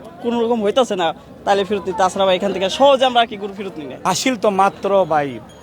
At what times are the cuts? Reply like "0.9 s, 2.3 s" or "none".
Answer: 3.9 s